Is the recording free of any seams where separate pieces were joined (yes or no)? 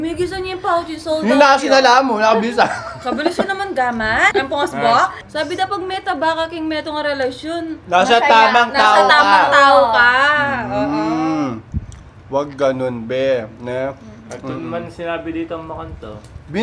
no